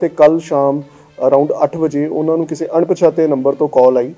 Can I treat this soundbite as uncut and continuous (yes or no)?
yes